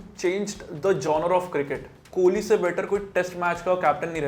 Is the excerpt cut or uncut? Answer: cut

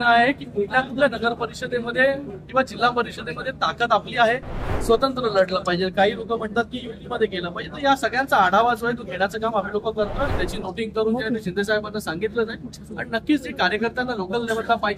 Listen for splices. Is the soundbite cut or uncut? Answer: cut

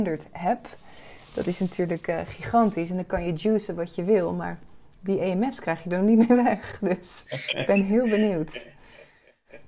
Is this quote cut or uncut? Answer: uncut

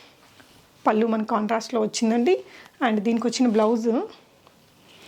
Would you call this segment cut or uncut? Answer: uncut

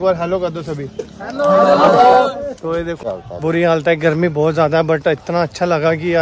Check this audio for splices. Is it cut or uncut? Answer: cut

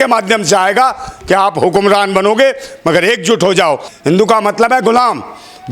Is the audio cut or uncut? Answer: cut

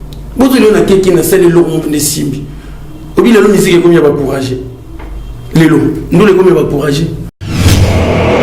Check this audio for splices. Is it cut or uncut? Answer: cut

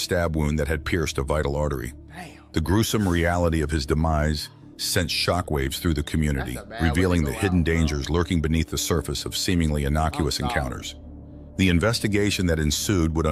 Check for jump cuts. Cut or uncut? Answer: uncut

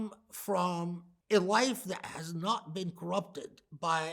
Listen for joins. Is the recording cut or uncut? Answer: cut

